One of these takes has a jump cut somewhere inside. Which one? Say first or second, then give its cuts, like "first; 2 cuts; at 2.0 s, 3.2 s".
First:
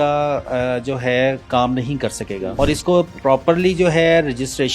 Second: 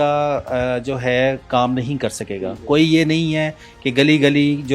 first; 1 cut; at 2.5 s